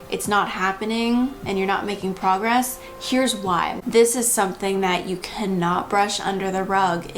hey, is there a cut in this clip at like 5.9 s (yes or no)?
no